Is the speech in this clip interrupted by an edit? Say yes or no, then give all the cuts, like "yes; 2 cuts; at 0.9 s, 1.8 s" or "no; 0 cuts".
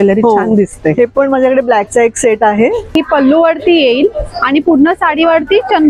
yes; 1 cut; at 2.9 s